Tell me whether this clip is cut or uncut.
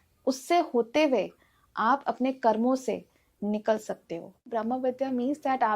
cut